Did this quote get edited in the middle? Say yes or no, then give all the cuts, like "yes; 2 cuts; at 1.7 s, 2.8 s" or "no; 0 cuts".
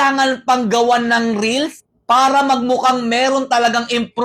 no; 0 cuts